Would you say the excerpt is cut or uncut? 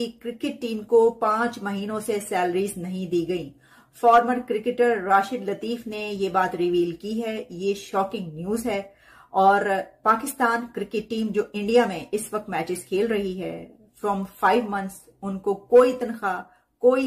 uncut